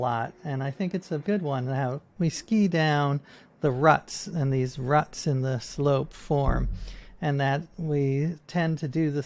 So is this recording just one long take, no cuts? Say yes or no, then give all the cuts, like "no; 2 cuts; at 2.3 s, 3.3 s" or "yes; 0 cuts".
no; 3 cuts; at 1.2 s, 2.0 s, 7.7 s